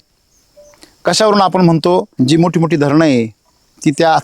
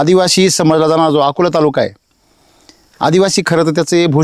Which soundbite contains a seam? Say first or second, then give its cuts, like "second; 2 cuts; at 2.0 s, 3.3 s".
first; 1 cut; at 2.1 s